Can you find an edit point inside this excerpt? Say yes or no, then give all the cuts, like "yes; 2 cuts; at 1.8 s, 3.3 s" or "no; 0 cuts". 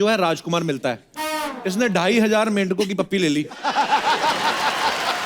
no; 0 cuts